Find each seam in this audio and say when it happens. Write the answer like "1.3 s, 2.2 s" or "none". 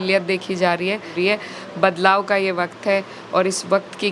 1.1 s